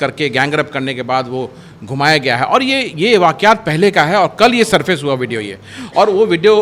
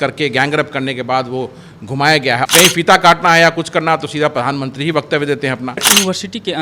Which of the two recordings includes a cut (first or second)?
second